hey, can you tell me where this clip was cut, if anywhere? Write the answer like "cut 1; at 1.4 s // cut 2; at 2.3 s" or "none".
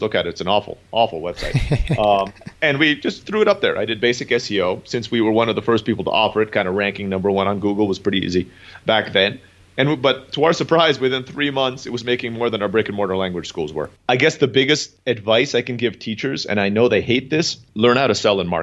cut 1; at 2.4 s // cut 2; at 13.9 s // cut 3; at 14.9 s // cut 4; at 17.6 s